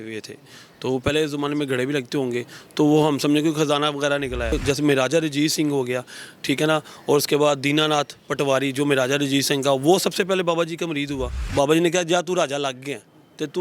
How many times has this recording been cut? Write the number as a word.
two